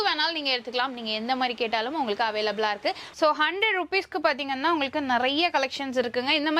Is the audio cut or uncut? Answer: cut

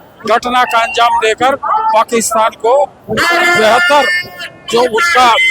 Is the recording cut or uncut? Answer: uncut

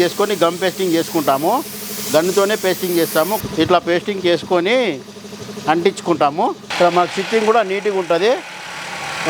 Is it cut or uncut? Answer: cut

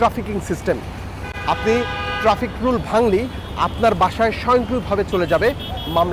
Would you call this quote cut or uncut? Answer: uncut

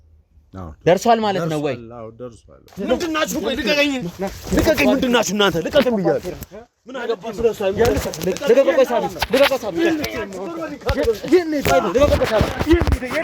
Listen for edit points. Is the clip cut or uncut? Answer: cut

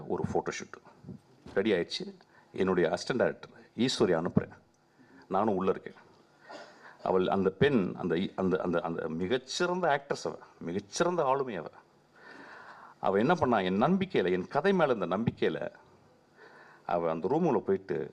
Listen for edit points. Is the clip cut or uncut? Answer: uncut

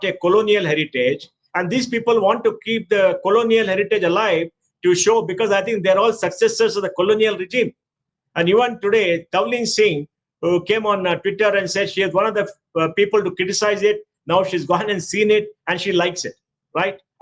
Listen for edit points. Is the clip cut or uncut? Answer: uncut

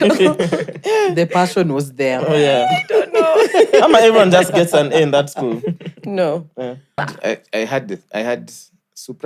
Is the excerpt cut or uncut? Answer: cut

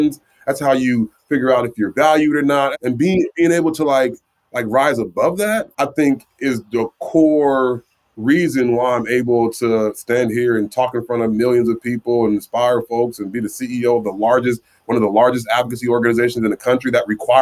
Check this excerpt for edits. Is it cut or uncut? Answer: cut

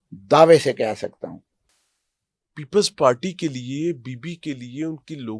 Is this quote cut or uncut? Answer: uncut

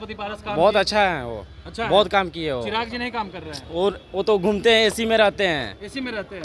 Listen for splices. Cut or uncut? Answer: uncut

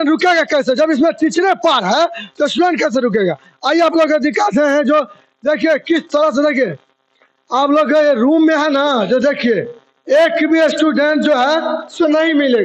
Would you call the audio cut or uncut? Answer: uncut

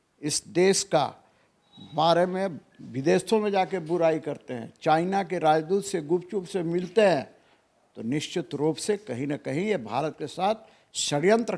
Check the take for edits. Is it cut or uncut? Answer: uncut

